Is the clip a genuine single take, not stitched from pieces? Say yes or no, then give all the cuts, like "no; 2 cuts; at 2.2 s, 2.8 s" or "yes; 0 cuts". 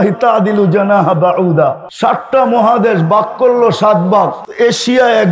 no; 2 cuts; at 1.9 s, 4.4 s